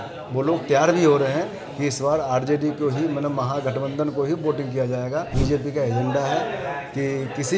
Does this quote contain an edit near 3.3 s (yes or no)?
no